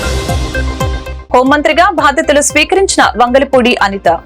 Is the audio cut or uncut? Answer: uncut